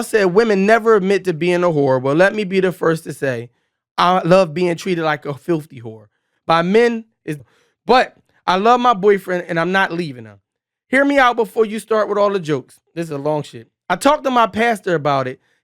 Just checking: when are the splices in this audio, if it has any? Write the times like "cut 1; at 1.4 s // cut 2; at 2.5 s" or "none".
cut 1; at 7.3 s